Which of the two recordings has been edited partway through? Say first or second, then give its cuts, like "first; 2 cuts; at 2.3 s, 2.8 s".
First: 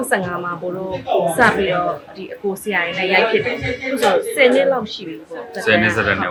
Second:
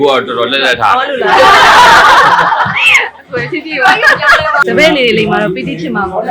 second; 1 cut; at 4.6 s